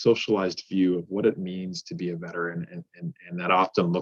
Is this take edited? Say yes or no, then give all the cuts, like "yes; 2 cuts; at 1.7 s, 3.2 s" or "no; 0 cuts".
no; 0 cuts